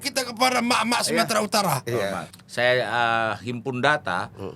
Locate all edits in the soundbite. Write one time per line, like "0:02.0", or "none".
0:02.3